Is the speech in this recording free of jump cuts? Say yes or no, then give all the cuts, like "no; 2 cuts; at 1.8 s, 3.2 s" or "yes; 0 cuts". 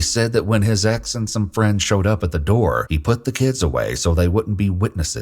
no; 1 cut; at 2.9 s